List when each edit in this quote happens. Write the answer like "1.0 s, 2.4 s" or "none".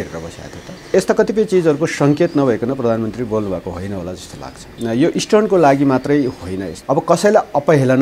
0.9 s, 4.8 s, 6.7 s